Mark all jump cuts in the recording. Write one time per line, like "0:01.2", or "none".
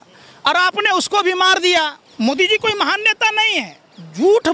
0:02.0

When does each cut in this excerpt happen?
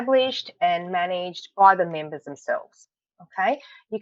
none

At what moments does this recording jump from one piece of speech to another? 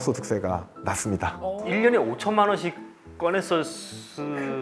0:01.6

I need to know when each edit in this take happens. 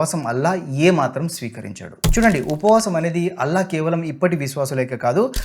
0:01.9

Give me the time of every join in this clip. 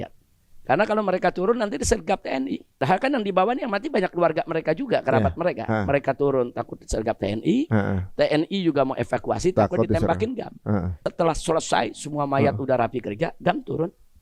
0:02.7
0:11.0

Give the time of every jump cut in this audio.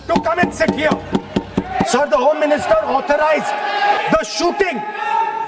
0:01.8
0:04.0

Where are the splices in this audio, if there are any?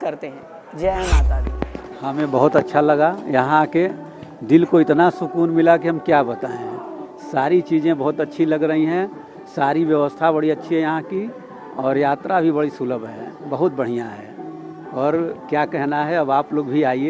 0:01.4

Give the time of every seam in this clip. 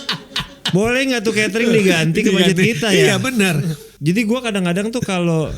0:03.8

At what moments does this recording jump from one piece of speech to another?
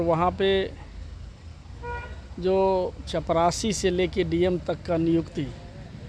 none

